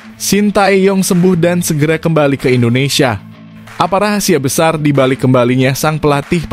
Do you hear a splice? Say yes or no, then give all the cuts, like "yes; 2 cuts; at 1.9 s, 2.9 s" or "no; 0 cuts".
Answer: no; 0 cuts